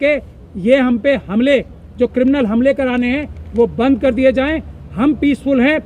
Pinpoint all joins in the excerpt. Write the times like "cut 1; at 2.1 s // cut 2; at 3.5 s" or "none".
none

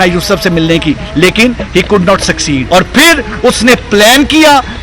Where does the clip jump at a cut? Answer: cut 1; at 2.6 s

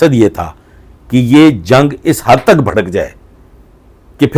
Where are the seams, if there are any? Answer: none

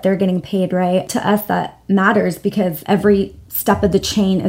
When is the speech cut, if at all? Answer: cut 1; at 1.1 s

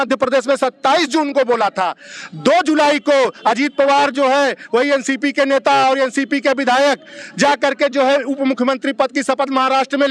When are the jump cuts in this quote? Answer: none

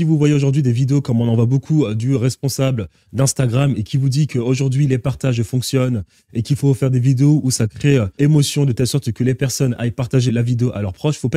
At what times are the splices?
cut 1; at 8.2 s // cut 2; at 10.3 s

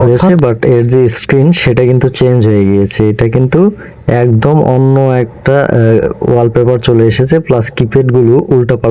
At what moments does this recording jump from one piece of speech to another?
none

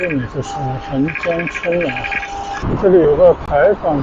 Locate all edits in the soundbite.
cut 1; at 2.6 s

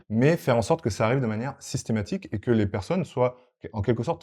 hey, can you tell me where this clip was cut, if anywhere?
none

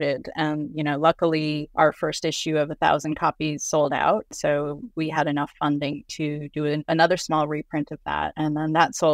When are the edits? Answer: cut 1; at 1.7 s // cut 2; at 4.3 s // cut 3; at 6.8 s // cut 4; at 8.3 s

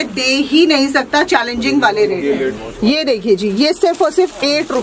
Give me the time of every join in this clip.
cut 1; at 2.5 s

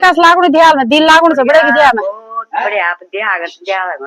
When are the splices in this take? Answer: none

